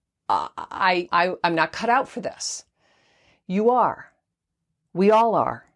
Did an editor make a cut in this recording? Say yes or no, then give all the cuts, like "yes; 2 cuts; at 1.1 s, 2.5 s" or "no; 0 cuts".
yes; 1 cut; at 1.1 s